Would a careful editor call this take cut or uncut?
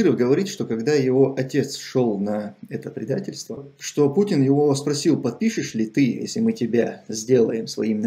cut